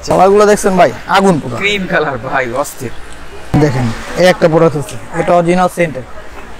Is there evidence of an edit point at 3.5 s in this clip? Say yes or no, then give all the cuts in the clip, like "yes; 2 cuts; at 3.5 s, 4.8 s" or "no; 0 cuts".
yes; 1 cut; at 3.5 s